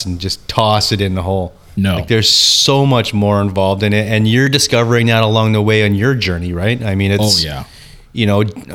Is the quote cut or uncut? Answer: cut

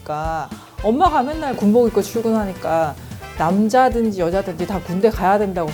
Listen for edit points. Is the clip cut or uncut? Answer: uncut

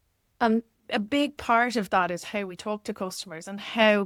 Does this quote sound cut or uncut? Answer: uncut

